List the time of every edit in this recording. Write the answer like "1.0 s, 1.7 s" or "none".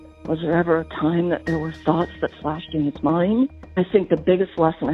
3.6 s